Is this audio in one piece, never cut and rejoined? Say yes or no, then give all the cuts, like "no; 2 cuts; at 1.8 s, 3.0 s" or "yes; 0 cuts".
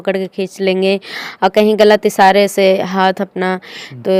yes; 0 cuts